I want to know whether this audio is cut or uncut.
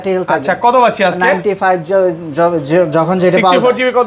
uncut